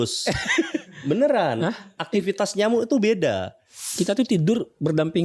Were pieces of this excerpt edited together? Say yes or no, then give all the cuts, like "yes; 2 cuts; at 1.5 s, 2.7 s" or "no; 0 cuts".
yes; 1 cut; at 3.8 s